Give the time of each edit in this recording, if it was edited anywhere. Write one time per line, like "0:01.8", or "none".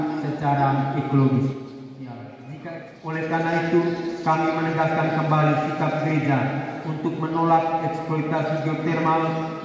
0:02.5

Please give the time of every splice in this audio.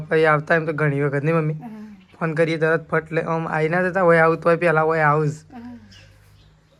none

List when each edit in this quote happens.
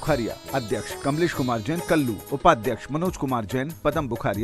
0:00.9
0:02.2

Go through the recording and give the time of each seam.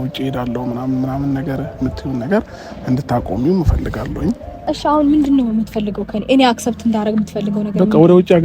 0:04.7

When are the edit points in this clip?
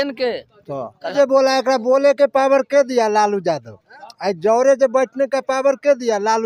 0:01.1

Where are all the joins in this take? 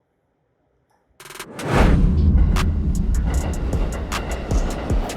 0:01.4

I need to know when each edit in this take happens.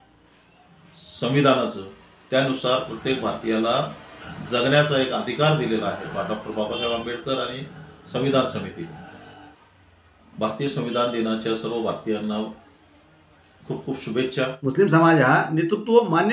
0:14.5

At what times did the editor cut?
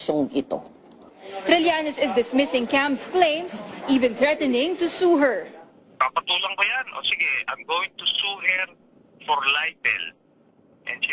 0:01.4

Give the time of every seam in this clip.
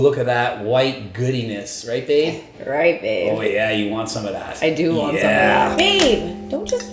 0:05.7

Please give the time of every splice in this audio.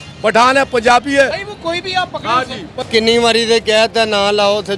0:02.7

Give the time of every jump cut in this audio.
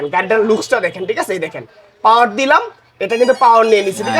none

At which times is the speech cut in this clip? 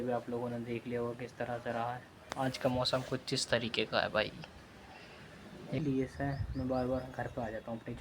0:02.2
0:05.8

